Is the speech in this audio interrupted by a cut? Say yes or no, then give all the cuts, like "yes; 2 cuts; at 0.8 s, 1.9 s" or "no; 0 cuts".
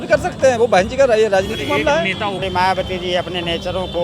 yes; 1 cut; at 2.4 s